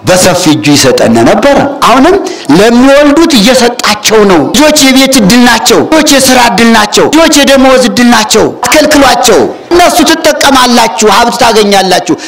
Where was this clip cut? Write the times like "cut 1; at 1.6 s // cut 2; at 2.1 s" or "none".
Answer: cut 1; at 1.8 s // cut 2; at 4.6 s // cut 3; at 5.9 s // cut 4; at 7.1 s // cut 5; at 8.6 s // cut 6; at 9.7 s